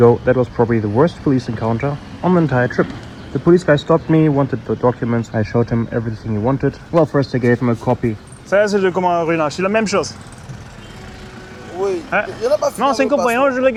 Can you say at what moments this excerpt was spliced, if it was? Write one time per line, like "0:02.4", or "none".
none

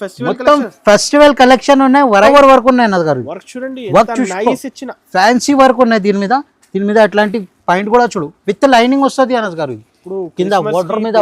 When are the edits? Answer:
0:02.3

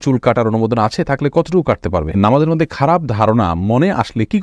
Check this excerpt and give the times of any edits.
0:02.1

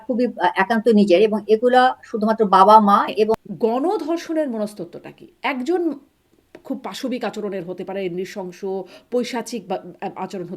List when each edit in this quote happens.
0:03.4

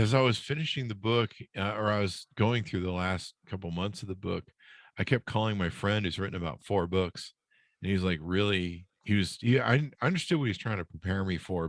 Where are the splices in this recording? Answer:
none

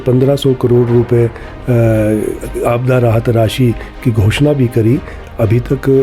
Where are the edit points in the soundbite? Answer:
none

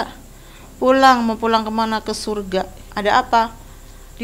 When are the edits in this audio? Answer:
0:02.9

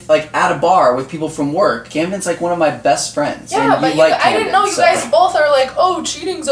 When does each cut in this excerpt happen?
0:01.8
0:03.4

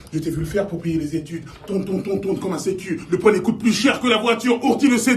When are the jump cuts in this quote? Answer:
0:01.0

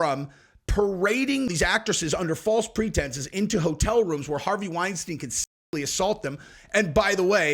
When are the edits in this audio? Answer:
0:01.5

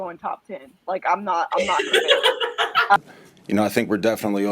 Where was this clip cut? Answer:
0:03.0

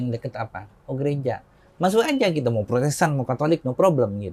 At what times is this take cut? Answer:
none

